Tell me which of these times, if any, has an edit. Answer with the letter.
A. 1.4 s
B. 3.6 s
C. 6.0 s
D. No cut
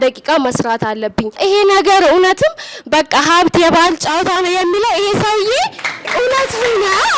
A